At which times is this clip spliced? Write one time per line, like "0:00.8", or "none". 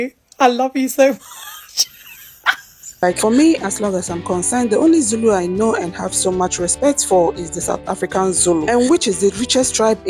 0:03.0